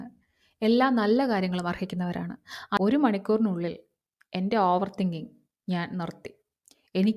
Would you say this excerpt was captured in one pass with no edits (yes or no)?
no